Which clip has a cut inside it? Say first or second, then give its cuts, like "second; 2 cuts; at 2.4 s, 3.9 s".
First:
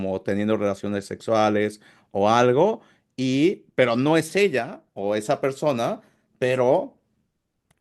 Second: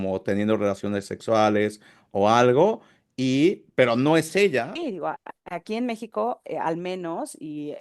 second; 1 cut; at 4.8 s